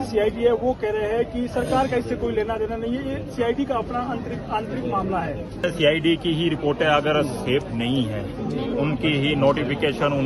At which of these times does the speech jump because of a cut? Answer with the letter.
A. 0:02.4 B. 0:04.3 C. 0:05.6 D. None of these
C